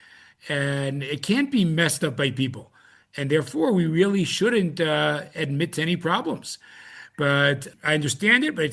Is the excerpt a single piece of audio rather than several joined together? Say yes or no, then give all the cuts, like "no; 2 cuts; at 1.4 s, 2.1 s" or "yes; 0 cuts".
no; 1 cut; at 7.7 s